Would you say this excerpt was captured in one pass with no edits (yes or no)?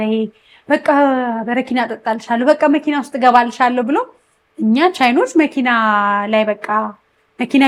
yes